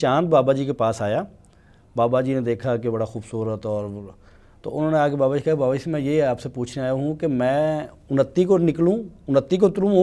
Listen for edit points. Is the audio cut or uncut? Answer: uncut